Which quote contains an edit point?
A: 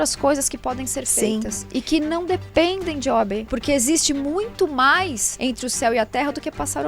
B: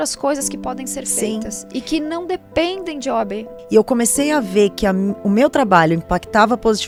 A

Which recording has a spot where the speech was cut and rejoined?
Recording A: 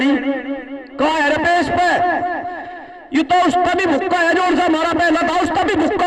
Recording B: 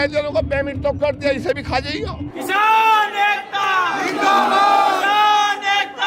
B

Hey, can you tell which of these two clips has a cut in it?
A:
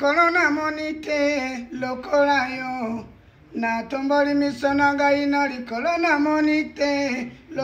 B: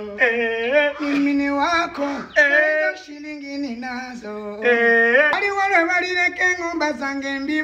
B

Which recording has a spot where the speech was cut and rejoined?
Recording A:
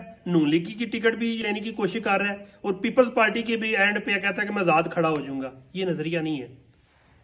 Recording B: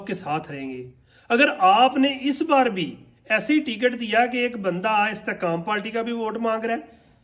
A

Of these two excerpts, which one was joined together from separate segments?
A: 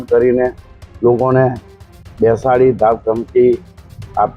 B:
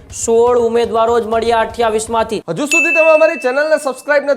B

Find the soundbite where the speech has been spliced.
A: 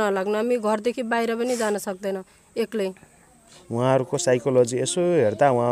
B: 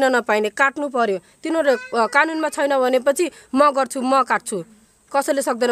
A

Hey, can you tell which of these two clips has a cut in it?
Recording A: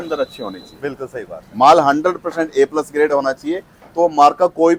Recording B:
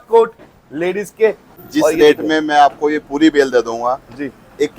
B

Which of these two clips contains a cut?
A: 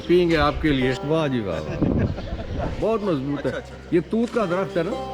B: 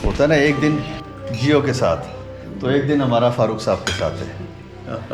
A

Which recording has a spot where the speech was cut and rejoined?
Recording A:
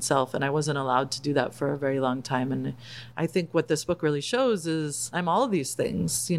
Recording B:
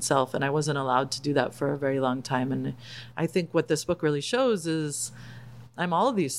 A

